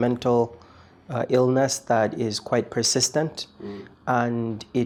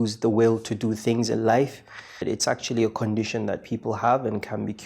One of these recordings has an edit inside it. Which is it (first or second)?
second